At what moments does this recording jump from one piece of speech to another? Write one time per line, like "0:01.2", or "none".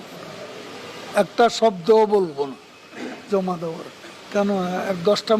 0:04.2